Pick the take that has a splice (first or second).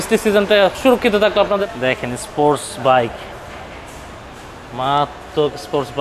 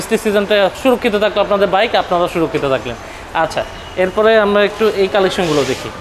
first